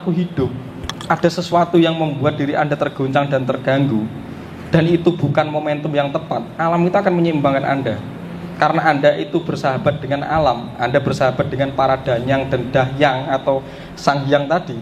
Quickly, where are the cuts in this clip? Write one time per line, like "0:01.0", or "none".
none